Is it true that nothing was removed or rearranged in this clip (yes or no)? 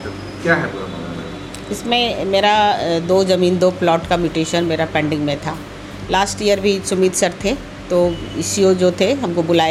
yes